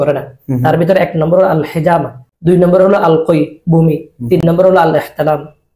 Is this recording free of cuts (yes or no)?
no